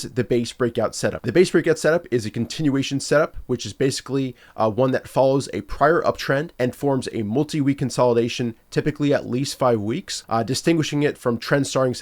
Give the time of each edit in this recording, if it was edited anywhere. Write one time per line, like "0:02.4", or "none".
0:01.3
0:06.5
0:10.1

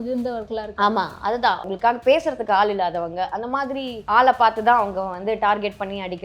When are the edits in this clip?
0:01.7
0:04.0

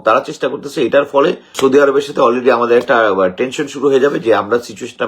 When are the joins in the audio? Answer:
0:01.5

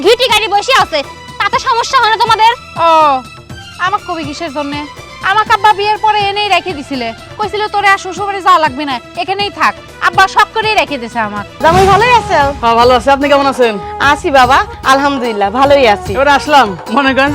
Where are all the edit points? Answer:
0:11.4

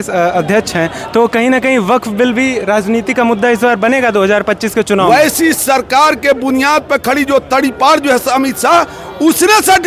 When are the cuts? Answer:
0:05.1

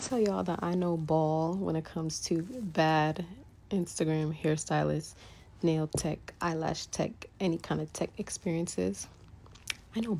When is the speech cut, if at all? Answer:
none

